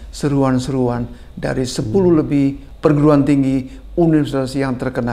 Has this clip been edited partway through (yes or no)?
yes